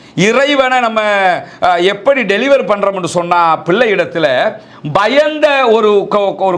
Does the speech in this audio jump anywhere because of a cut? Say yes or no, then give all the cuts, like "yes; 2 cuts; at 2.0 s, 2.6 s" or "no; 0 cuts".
no; 0 cuts